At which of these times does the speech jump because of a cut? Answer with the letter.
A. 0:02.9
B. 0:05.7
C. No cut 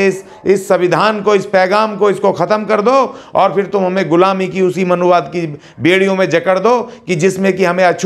C